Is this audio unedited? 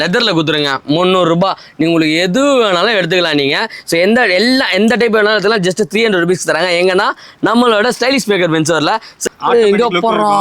no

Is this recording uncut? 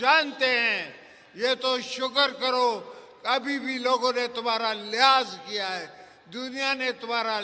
yes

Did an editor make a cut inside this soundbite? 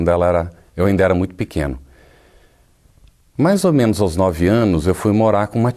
yes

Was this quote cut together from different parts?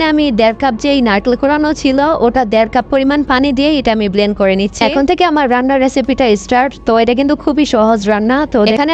no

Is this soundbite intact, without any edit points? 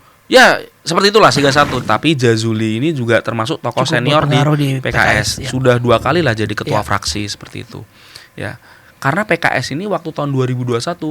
no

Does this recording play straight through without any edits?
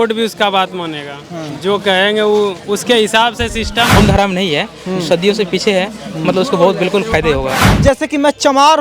no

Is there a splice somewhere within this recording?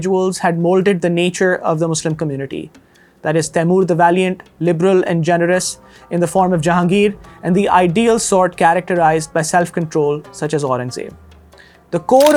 no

